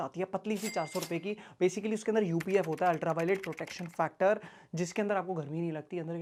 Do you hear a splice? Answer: no; 0 cuts

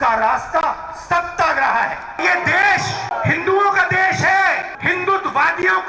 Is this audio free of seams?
no; 3 cuts; at 2.2 s, 3.1 s, 4.7 s

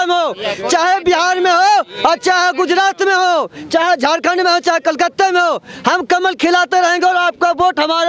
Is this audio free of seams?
yes; 0 cuts

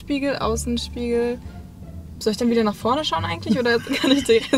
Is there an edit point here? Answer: no; 0 cuts

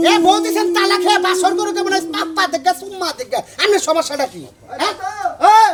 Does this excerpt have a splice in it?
no; 0 cuts

